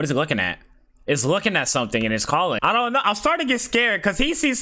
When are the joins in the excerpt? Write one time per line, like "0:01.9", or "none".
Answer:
0:02.6